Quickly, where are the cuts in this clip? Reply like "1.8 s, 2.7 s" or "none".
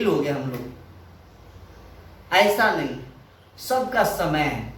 none